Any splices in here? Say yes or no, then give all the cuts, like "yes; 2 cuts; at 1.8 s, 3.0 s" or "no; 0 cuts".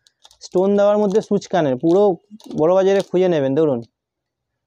no; 0 cuts